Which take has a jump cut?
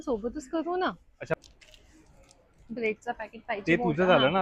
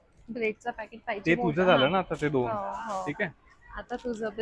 first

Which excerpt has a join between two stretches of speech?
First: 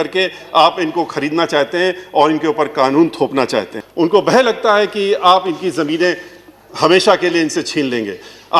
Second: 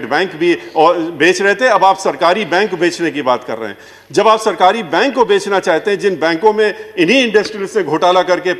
first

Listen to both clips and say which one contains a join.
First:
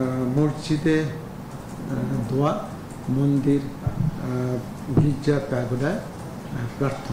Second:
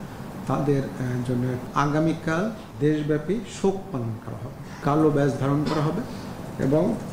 second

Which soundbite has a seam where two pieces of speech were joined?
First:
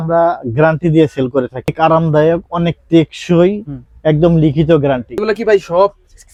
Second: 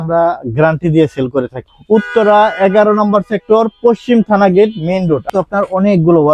second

